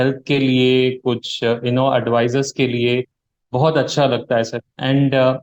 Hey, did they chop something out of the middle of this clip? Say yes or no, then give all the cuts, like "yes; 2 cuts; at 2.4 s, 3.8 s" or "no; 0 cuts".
no; 0 cuts